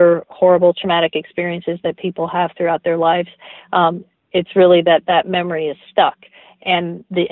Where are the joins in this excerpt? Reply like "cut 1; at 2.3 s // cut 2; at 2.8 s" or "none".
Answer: none